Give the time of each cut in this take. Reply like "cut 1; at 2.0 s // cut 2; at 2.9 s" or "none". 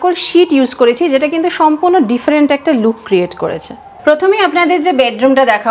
none